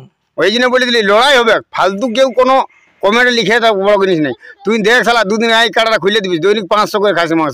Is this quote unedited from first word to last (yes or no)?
yes